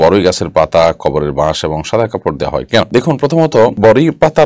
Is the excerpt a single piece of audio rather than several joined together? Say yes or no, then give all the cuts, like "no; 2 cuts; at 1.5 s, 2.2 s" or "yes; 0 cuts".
yes; 0 cuts